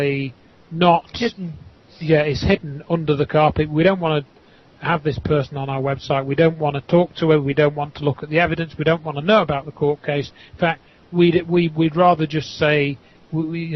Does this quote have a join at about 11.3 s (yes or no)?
yes